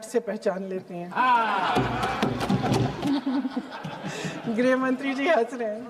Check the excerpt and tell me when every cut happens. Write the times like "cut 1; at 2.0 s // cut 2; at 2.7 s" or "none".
cut 1; at 3.0 s